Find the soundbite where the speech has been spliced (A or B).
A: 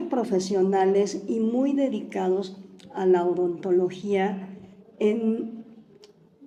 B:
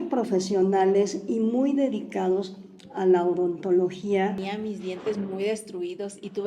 B